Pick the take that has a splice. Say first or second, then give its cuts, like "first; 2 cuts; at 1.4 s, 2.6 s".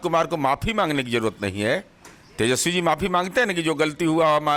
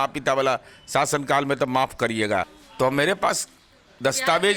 second; 1 cut; at 2.6 s